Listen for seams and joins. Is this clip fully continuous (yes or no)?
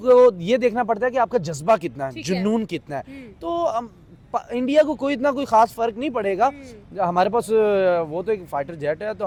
yes